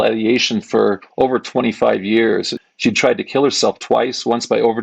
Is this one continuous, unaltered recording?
no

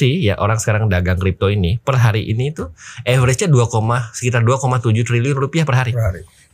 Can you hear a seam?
no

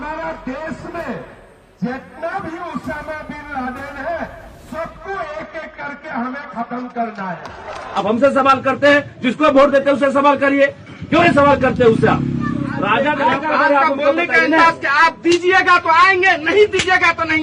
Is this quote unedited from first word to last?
no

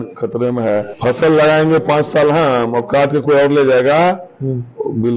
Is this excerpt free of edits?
no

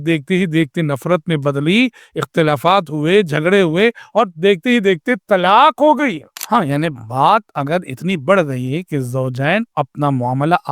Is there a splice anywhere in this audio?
yes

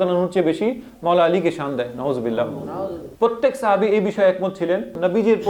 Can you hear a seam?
yes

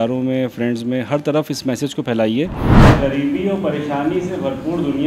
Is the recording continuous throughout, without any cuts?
no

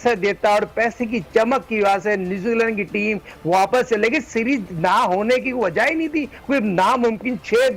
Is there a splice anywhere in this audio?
no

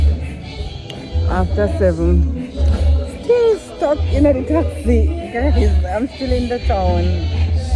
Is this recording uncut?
yes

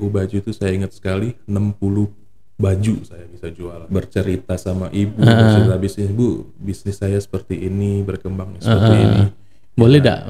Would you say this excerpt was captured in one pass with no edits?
no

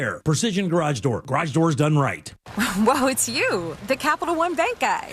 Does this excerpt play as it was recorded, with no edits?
no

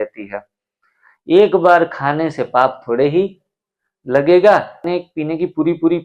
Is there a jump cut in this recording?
yes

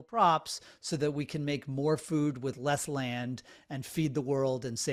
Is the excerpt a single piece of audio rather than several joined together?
yes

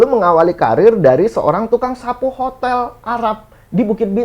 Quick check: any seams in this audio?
no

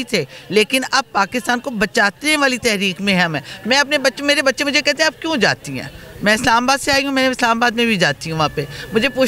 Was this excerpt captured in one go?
yes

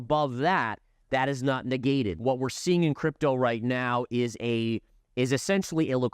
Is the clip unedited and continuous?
no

